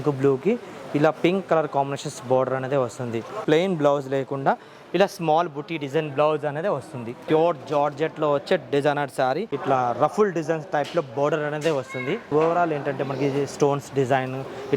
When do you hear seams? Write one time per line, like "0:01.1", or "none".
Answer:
0:03.4
0:07.2
0:09.5
0:12.3